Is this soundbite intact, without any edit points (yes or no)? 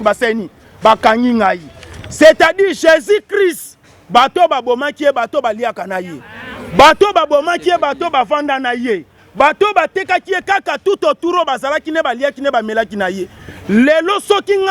yes